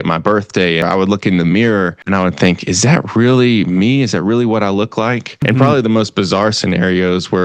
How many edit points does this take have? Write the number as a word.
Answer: three